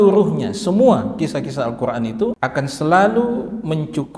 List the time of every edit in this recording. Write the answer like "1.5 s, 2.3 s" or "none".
2.4 s